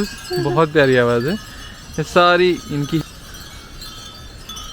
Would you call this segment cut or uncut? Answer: cut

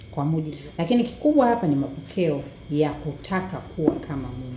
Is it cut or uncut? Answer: cut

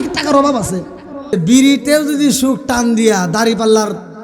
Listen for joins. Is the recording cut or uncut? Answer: cut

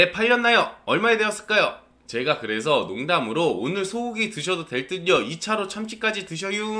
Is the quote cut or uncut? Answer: uncut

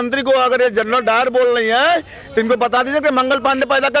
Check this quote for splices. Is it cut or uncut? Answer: uncut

